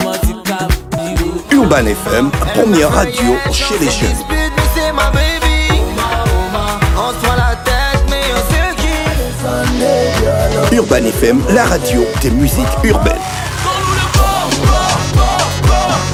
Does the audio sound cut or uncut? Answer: uncut